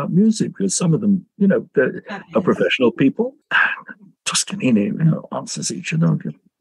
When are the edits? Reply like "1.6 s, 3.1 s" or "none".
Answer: 3.5 s